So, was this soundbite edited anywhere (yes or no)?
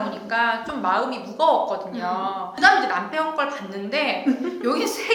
no